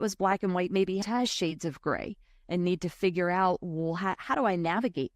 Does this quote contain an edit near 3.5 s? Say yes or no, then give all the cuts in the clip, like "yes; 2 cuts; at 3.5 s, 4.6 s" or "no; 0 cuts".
no; 1 cut; at 1.0 s